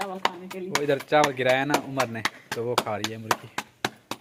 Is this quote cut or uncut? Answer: uncut